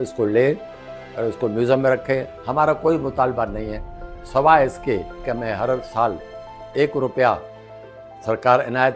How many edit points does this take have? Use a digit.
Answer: 1